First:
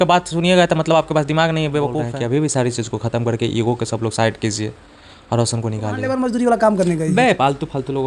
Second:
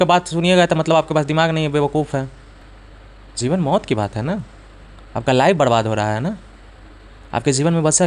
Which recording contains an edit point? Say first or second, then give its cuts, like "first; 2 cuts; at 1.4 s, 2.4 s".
first; 2 cuts; at 2.1 s, 6.0 s